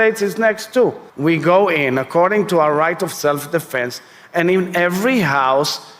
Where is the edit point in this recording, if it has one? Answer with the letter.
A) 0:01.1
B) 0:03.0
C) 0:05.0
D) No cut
A